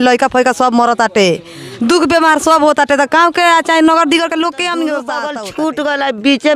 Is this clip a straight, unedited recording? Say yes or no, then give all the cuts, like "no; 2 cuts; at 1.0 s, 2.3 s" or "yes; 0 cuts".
no; 1 cut; at 5.4 s